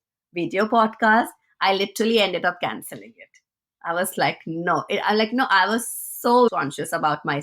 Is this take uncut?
no; 1 cut; at 6.5 s

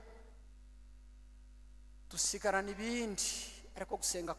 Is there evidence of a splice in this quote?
no; 0 cuts

